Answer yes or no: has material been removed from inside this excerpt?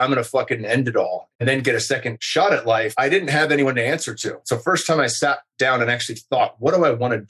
yes